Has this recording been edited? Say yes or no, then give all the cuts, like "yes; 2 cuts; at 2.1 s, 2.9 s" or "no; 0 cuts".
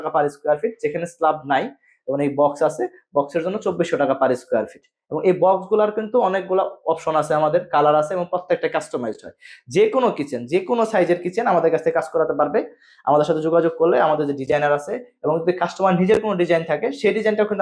no; 0 cuts